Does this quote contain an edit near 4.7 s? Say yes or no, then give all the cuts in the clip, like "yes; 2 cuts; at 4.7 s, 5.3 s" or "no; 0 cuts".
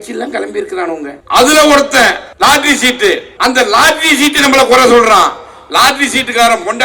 no; 3 cuts; at 1.2 s, 2.3 s, 3.3 s